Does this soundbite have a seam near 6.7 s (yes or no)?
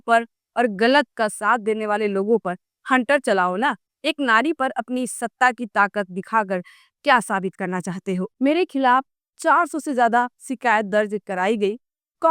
no